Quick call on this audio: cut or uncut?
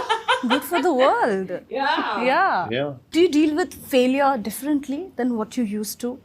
uncut